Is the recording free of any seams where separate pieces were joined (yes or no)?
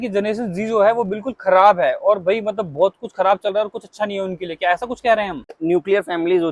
no